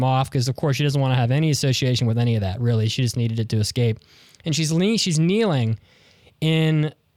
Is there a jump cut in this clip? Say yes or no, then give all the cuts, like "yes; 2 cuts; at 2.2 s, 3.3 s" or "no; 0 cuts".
no; 0 cuts